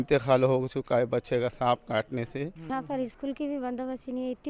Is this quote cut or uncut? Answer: cut